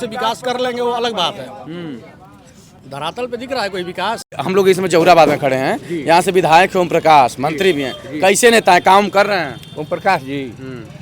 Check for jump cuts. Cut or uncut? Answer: cut